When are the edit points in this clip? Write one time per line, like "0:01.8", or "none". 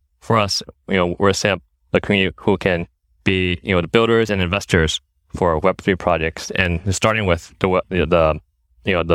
none